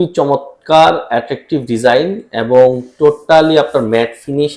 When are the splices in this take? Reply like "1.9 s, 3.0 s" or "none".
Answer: none